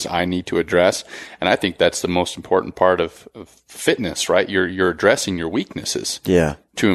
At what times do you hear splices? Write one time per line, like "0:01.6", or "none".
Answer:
none